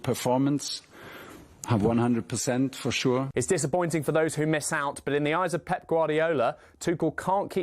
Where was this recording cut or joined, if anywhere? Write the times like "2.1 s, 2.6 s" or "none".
3.3 s

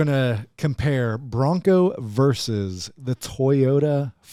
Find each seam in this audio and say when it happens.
none

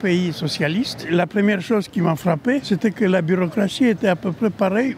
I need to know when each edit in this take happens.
1.1 s, 2.6 s

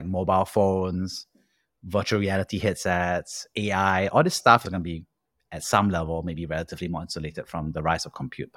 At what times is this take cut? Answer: 4.6 s

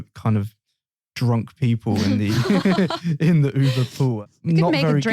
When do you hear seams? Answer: 4.2 s

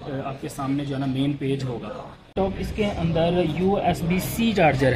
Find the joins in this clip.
2.3 s

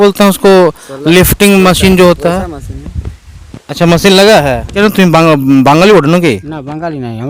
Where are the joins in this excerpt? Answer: 4.7 s

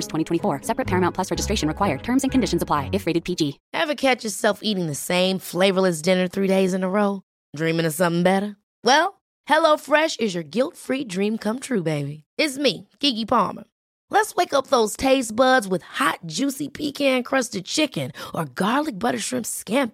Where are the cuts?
3.6 s

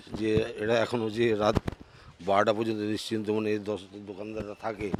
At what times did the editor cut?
none

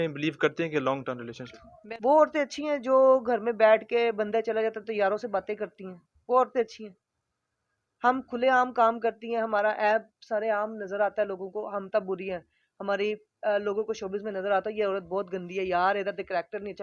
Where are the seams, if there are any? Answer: 1.8 s

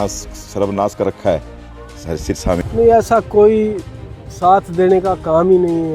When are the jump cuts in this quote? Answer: 2.7 s

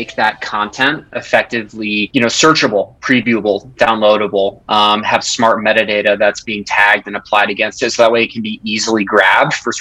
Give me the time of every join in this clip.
2.1 s

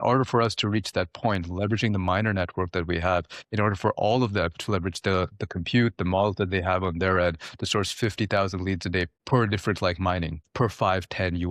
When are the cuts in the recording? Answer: 9.2 s, 10.4 s

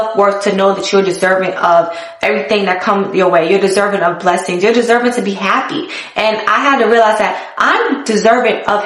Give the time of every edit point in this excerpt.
none

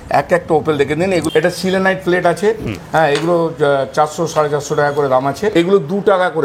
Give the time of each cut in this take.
1.2 s, 5.5 s

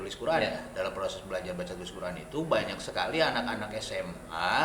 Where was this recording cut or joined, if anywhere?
none

